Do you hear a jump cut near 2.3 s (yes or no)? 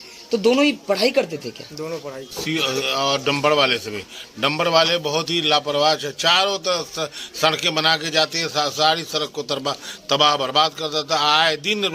yes